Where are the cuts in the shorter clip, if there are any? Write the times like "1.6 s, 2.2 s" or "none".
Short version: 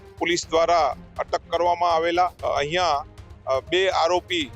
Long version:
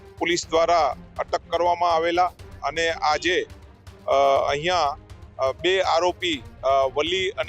2.5 s